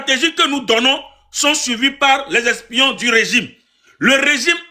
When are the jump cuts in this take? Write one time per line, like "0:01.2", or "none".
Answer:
none